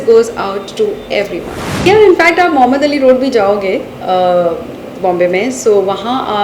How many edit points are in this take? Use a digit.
1